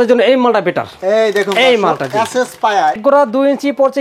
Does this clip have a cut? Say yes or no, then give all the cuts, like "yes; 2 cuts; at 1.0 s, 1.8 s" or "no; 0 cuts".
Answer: yes; 1 cut; at 3.0 s